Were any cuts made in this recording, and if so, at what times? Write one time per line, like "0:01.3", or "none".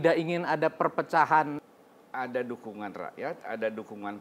0:01.7